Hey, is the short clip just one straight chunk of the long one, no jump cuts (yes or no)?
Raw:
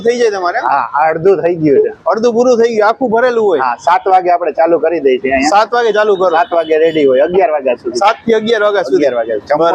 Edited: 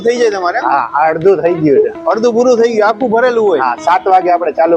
yes